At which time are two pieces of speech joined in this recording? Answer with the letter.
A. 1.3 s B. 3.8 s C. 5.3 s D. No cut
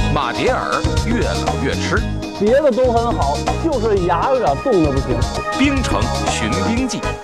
C